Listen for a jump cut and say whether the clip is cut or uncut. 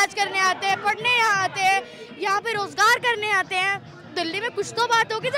uncut